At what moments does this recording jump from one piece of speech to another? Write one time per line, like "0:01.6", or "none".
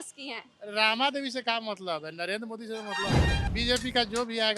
0:03.5